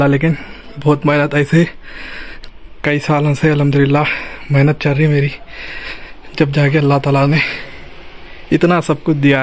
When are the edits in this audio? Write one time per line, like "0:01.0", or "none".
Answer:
none